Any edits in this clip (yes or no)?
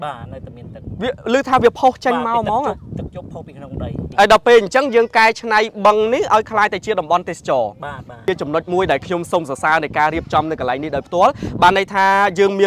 yes